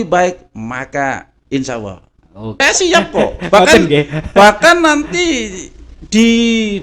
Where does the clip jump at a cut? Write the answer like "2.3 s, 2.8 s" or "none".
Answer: 2.6 s